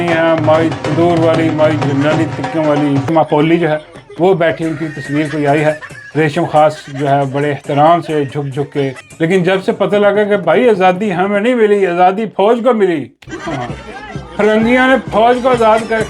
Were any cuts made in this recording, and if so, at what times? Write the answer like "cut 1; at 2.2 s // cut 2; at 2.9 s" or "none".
cut 1; at 3.1 s // cut 2; at 9.0 s

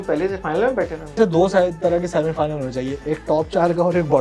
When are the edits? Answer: cut 1; at 1.2 s

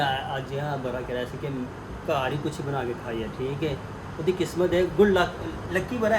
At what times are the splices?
none

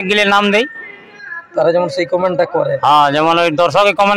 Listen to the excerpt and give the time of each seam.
none

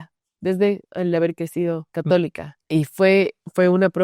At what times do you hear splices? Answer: cut 1; at 1.9 s // cut 2; at 2.5 s

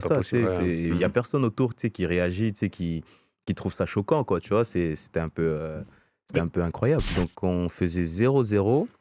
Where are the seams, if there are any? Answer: cut 1; at 7.1 s

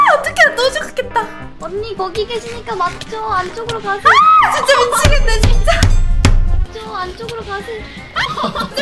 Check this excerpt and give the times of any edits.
cut 1; at 1.5 s // cut 2; at 6.6 s

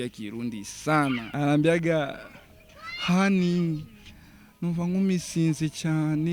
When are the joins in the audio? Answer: cut 1; at 1.3 s

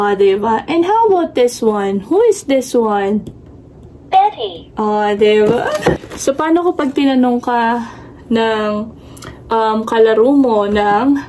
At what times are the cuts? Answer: cut 1; at 6.1 s

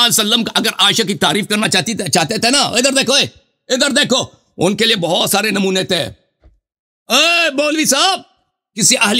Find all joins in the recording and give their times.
none

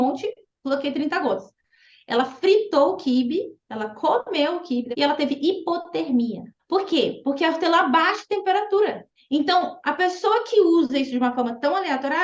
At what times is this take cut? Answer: cut 1; at 4.9 s // cut 2; at 6.5 s // cut 3; at 9.1 s

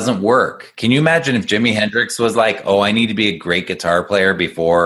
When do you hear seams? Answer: none

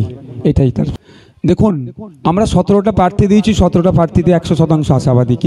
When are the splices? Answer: cut 1; at 0.9 s

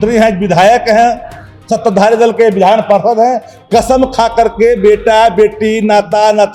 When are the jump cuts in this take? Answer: none

